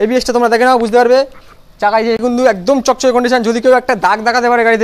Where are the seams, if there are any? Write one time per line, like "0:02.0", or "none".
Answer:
0:02.2